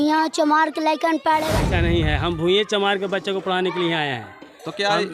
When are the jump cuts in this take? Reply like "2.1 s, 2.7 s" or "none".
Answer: 1.5 s

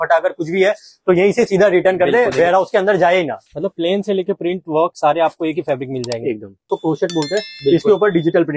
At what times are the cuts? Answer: 3.4 s, 6.7 s

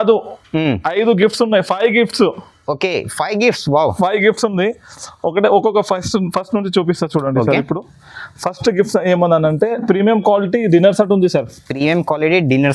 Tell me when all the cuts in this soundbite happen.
none

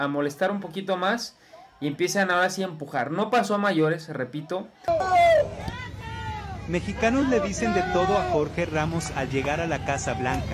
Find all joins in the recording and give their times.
4.9 s

